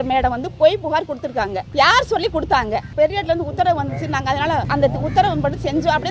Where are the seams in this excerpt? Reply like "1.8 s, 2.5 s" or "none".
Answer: 1.6 s, 2.9 s, 4.7 s